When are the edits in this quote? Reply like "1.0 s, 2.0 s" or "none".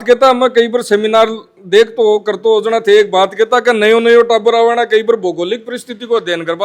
none